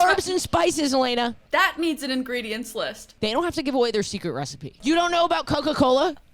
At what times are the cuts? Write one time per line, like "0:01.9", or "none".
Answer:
0:01.4
0:03.0
0:04.7

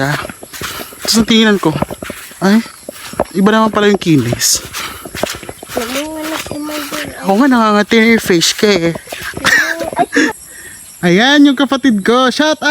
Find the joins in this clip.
0:10.4

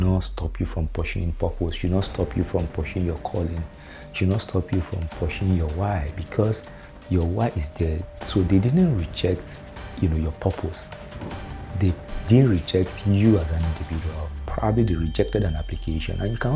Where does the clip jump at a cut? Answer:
none

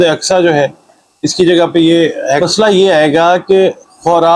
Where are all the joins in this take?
0:02.4

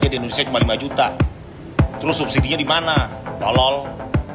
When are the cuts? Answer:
none

